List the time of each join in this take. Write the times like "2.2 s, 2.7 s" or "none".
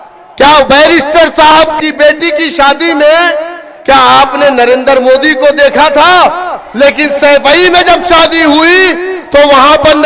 1.8 s